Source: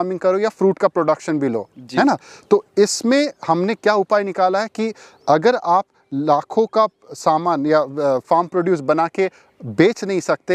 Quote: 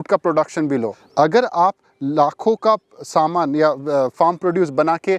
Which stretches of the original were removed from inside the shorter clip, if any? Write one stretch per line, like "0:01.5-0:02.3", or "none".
0:01.7-0:05.1